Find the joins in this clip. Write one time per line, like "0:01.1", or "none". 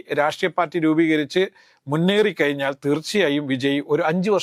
none